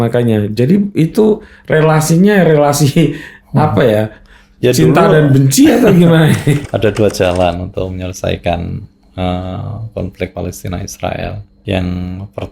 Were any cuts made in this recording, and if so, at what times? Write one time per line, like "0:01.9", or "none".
0:06.7
0:11.5